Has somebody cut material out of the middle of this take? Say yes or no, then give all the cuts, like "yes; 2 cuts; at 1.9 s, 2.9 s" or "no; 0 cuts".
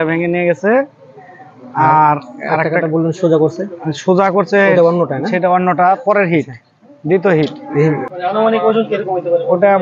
yes; 1 cut; at 8.1 s